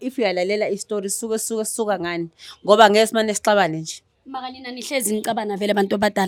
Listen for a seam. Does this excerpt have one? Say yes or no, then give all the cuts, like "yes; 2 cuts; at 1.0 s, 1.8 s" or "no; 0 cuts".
no; 0 cuts